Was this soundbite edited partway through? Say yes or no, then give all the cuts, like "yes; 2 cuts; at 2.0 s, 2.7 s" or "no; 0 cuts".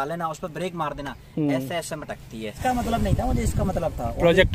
yes; 1 cut; at 2.6 s